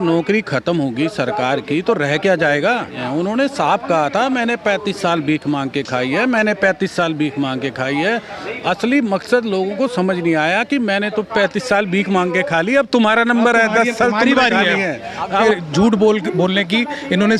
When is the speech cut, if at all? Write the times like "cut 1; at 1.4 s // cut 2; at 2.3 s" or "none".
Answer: cut 1; at 3.0 s // cut 2; at 15.4 s